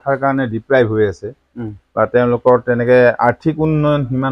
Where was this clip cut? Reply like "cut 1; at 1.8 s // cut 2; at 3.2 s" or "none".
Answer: none